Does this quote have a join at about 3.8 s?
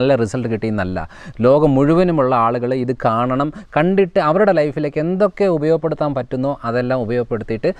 no; 0 cuts

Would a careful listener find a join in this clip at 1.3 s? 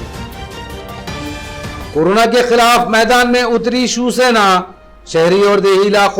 yes; 1 cut; at 1.3 s

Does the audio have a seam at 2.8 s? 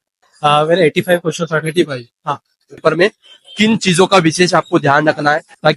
yes; 1 cut; at 2.8 s

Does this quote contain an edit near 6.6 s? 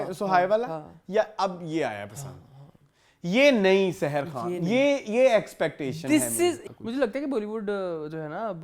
yes; 1 cut; at 6.6 s

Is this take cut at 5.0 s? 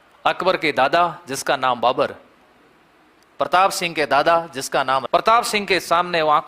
yes; 1 cut; at 5.0 s

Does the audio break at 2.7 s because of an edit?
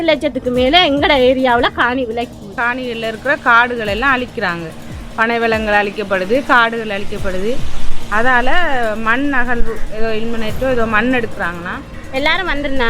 yes; 2 cuts; at 2.7 s, 12.0 s

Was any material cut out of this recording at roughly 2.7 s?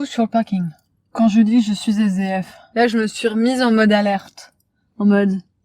no; 1 cut; at 1.1 s

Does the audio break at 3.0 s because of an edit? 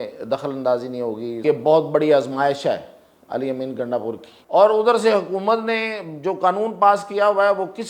no; 2 cuts; at 1.4 s, 4.3 s

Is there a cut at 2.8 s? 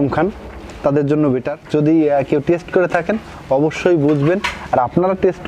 no; 1 cut; at 1.5 s

